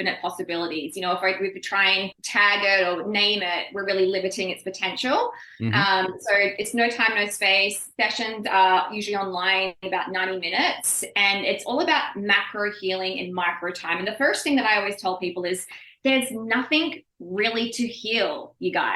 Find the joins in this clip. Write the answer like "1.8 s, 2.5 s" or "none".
2.2 s